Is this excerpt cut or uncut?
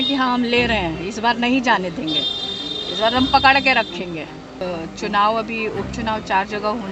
cut